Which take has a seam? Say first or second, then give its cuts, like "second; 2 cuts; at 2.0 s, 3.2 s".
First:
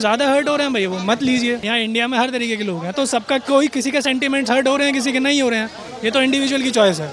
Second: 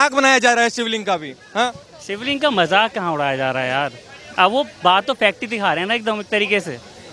first; 1 cut; at 1.7 s